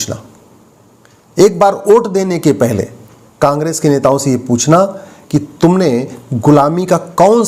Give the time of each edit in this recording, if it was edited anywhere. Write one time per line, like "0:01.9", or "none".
none